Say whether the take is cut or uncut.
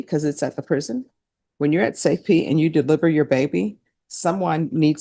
uncut